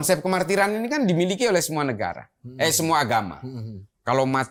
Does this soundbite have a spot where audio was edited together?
no; 0 cuts

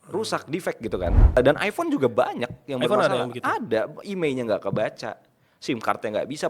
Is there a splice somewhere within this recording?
yes; 1 cut; at 1.3 s

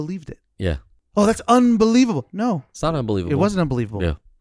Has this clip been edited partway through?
no; 0 cuts

